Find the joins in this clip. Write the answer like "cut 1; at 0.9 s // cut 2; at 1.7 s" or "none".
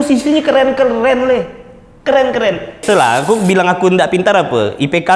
cut 1; at 2.8 s